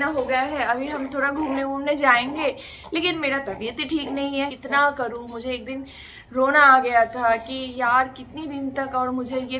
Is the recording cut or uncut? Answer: cut